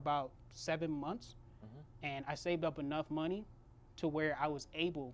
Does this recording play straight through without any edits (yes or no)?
yes